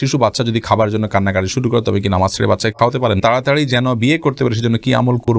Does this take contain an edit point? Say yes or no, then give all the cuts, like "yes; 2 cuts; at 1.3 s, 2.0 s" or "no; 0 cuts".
yes; 1 cut; at 3.2 s